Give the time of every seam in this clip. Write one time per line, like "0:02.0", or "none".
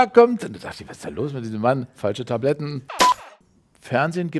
0:03.3